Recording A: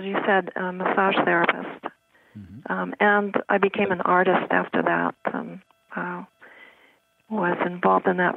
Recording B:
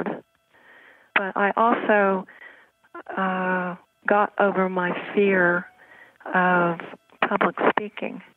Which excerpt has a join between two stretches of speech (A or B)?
B